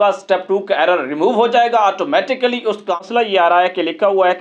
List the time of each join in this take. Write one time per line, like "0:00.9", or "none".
0:03.0